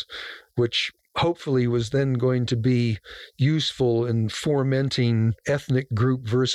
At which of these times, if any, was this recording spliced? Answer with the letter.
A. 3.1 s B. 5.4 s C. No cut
B